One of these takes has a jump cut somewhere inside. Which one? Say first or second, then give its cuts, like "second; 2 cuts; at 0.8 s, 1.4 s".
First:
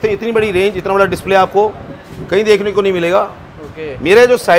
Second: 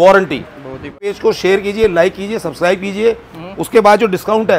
second; 1 cut; at 1.2 s